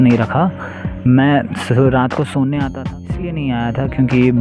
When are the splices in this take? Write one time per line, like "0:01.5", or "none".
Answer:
0:03.3